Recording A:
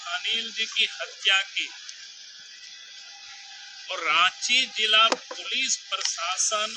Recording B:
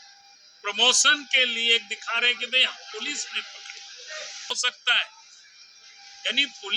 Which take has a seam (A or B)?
B